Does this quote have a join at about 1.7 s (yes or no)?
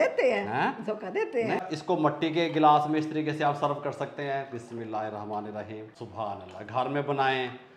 yes